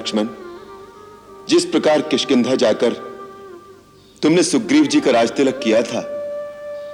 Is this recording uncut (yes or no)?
yes